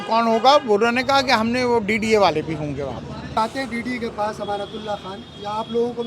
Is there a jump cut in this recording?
yes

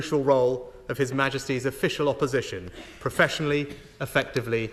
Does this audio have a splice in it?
no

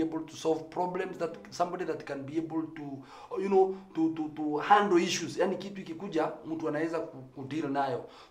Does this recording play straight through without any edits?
yes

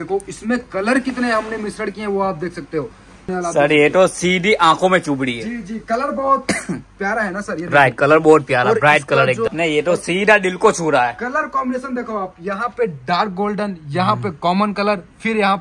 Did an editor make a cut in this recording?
yes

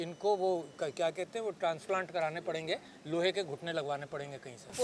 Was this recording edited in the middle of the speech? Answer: no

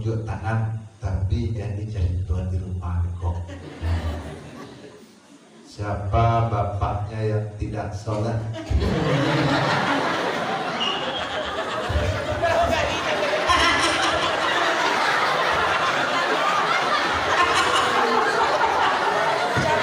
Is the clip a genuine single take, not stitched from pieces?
yes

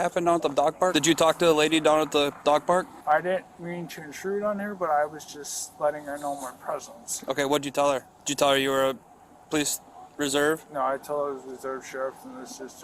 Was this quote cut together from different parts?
yes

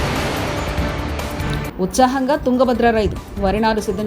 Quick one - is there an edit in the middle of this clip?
yes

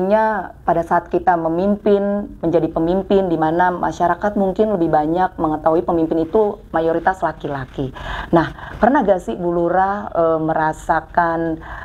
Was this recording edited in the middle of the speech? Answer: no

